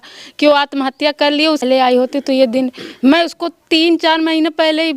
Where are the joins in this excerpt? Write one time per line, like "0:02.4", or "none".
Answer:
0:01.6